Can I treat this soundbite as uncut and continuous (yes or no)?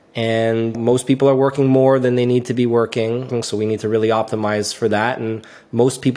no